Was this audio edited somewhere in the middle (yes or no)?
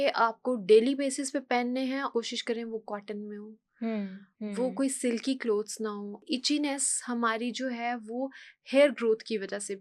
yes